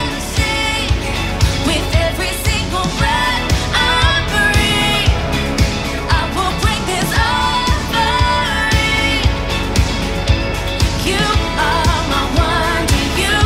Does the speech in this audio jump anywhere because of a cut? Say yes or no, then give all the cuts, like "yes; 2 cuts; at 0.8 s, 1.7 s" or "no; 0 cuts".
no; 0 cuts